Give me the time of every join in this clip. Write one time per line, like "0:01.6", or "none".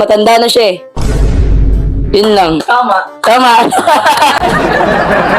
0:04.4

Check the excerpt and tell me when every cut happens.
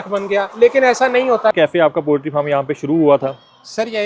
0:01.5

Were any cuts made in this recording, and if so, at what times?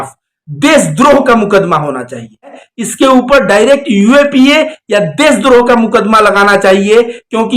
0:02.7

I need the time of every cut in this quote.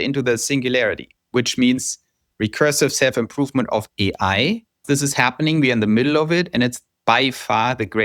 0:01.1
0:04.8

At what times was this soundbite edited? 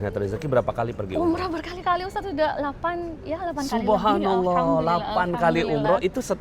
none

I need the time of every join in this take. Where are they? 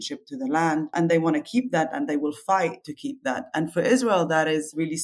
0:00.9
0:02.9

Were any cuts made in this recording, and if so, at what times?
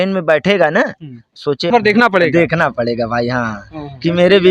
0:01.7

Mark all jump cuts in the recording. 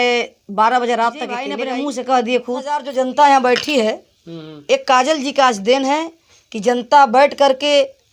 0:01.5
0:02.9

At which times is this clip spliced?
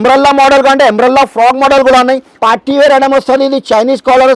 0:02.4

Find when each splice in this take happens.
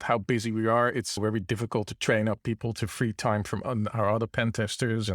0:01.2

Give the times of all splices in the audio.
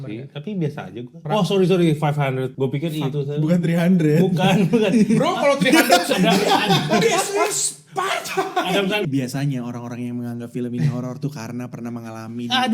0:01.2
0:02.5
0:09.0

